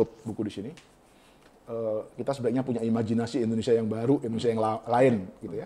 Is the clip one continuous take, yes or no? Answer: yes